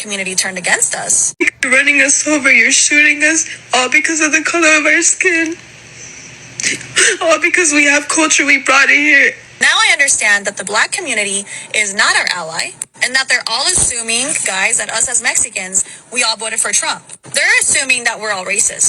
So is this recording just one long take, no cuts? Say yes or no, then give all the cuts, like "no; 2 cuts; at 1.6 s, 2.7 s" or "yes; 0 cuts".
no; 2 cuts; at 1.2 s, 9.5 s